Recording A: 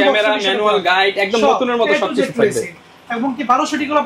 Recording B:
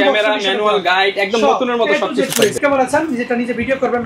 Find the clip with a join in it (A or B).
B